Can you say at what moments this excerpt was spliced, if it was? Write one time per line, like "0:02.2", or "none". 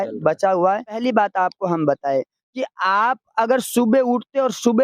0:01.0